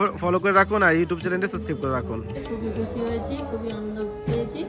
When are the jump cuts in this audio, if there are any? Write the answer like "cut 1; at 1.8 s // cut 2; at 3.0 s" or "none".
cut 1; at 2.4 s